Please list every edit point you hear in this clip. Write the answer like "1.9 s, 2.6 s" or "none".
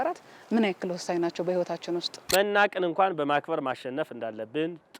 2.3 s